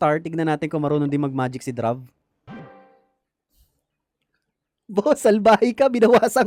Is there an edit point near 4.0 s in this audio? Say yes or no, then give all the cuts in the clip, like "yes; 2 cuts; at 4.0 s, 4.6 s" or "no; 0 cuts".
no; 0 cuts